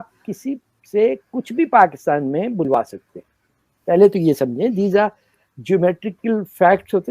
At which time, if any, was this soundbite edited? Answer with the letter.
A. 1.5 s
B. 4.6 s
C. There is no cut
C